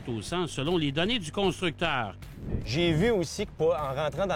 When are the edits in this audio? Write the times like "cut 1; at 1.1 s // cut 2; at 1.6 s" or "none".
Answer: cut 1; at 2.6 s